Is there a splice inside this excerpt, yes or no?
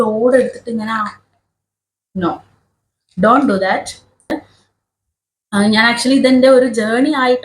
yes